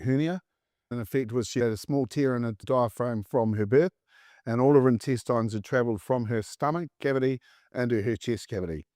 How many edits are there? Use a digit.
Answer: 1